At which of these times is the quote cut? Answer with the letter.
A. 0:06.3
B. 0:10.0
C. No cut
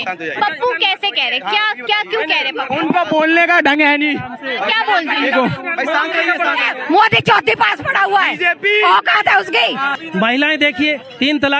B